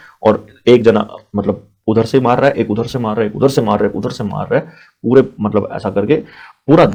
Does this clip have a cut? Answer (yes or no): no